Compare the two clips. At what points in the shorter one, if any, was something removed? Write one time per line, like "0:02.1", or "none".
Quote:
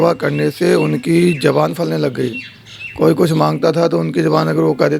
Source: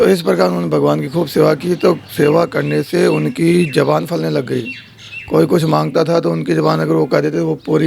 none